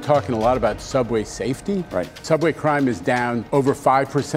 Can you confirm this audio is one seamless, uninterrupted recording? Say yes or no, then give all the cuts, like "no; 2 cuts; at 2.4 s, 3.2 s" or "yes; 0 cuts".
no; 2 cuts; at 2.2 s, 3.4 s